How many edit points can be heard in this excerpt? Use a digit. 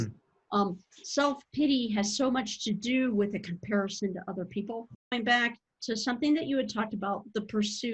1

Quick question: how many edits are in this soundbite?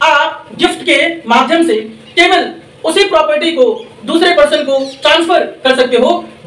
0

